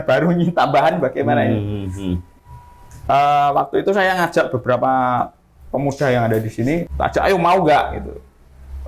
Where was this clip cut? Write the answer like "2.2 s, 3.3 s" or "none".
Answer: 6.9 s